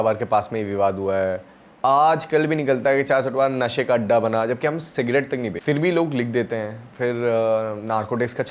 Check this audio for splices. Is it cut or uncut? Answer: cut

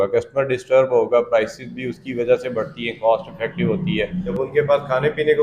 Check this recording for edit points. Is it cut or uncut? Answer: cut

